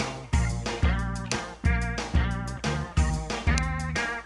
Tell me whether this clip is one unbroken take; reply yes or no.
no